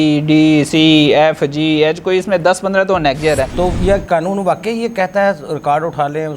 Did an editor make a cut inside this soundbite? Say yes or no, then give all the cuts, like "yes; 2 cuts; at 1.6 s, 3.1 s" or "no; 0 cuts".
yes; 1 cut; at 3.5 s